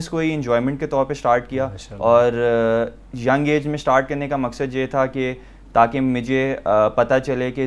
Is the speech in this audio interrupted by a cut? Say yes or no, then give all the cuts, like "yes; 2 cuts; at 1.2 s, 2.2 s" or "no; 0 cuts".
no; 0 cuts